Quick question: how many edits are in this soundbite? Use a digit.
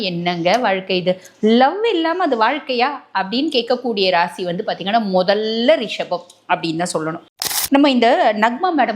1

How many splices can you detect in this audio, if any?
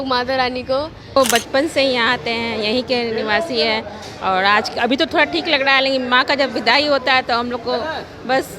1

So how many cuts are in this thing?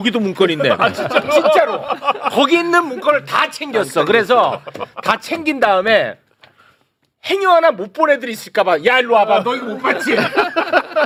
0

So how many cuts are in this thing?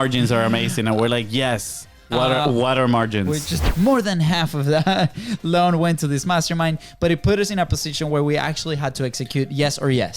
1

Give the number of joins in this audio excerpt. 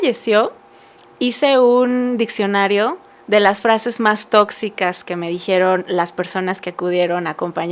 0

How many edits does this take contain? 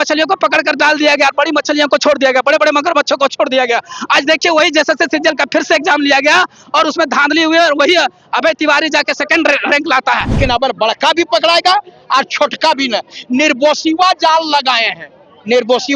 1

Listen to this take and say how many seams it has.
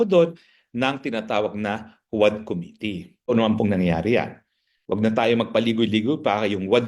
1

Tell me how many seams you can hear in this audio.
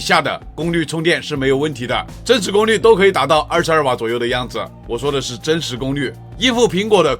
1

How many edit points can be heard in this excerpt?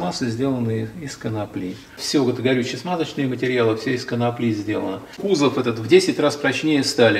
2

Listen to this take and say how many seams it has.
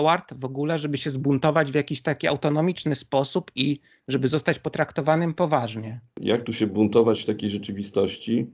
1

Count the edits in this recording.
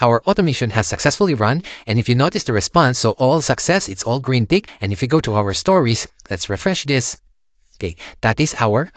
1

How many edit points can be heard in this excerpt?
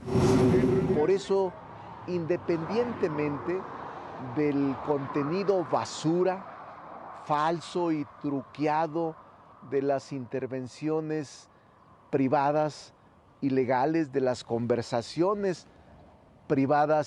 1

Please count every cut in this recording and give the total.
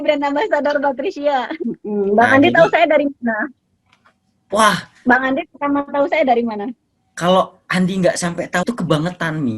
2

